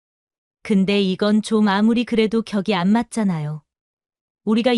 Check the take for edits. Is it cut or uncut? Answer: uncut